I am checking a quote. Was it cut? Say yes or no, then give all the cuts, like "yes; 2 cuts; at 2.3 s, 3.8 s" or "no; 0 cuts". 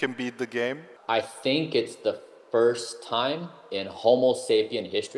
yes; 1 cut; at 0.9 s